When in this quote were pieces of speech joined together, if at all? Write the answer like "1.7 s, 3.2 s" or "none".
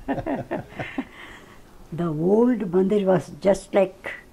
1.1 s